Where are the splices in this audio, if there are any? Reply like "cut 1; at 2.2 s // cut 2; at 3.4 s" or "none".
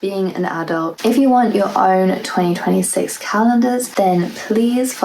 cut 1; at 1.0 s // cut 2; at 3.9 s